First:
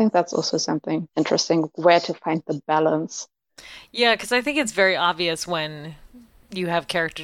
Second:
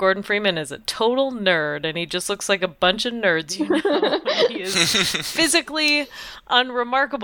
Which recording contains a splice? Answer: first; 1 cut; at 1.1 s

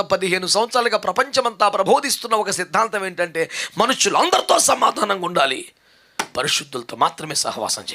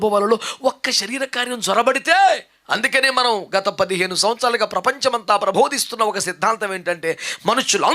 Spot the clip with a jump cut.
second; 1 cut; at 2.5 s

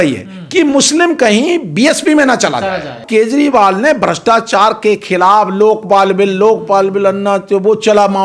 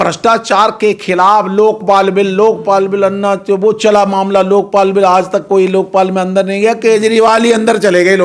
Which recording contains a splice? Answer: first; 1 cut; at 3.0 s

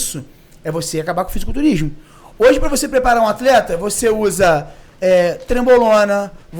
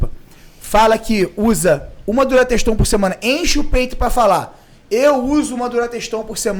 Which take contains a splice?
first; 1 cut; at 2.2 s

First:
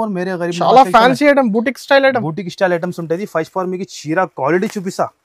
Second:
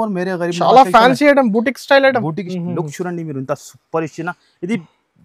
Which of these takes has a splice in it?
second; 1 cut; at 2.4 s

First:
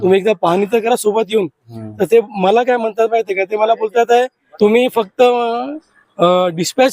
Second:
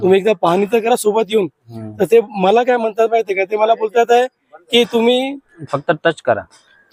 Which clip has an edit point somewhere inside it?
first; 1 cut; at 4.4 s

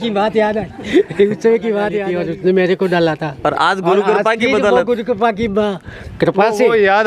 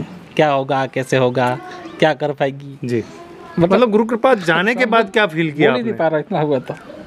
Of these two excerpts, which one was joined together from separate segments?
first; 1 cut; at 2.0 s

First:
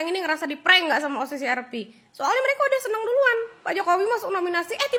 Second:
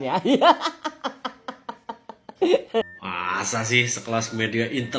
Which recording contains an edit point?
second; 1 cut; at 2.8 s

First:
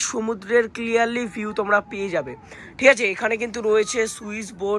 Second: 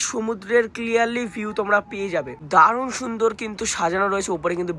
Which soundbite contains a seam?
second; 1 cut; at 2.4 s

